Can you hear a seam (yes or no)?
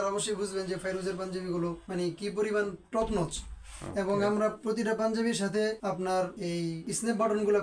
no